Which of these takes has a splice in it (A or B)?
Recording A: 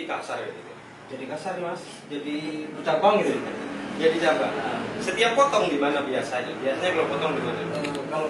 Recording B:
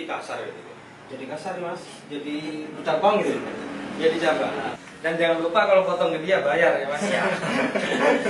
B